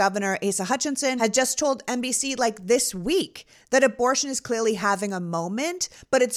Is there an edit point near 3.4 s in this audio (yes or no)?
no